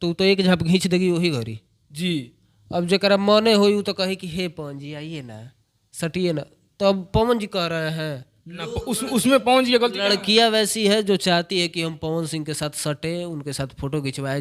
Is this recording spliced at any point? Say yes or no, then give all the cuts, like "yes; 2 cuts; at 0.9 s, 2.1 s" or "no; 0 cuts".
no; 0 cuts